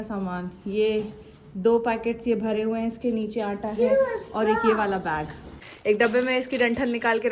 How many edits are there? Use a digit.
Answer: 1